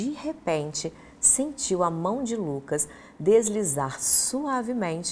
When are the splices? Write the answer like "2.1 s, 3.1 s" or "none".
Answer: none